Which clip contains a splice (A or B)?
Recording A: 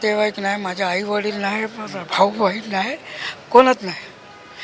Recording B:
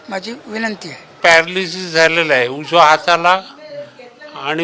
B